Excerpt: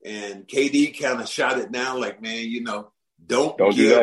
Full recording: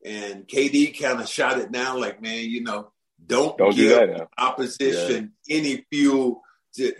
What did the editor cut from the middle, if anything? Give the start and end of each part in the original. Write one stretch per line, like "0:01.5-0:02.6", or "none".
none